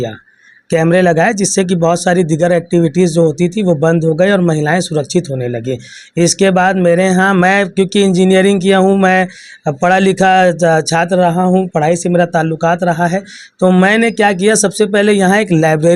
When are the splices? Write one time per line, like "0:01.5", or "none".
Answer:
none